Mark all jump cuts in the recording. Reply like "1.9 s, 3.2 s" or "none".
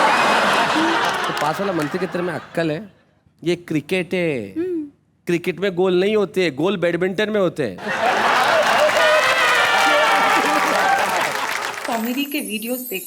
11.7 s